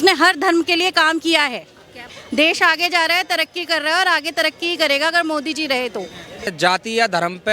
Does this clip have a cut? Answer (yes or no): yes